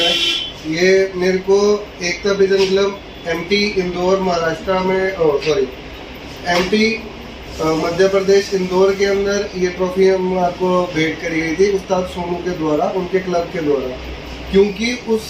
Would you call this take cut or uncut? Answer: uncut